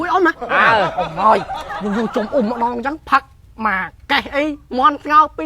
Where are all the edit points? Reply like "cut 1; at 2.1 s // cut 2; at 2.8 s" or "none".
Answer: cut 1; at 1.0 s